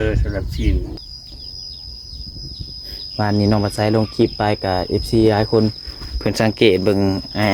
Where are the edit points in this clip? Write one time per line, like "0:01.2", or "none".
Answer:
0:01.0

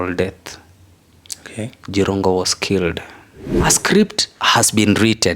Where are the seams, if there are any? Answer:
0:03.6

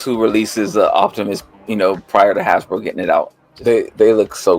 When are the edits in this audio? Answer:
0:03.4

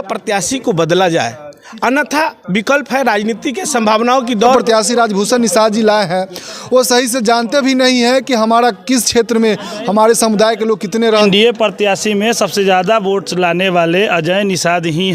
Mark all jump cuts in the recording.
0:04.5
0:11.2

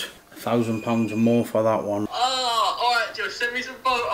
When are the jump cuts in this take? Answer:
0:02.1

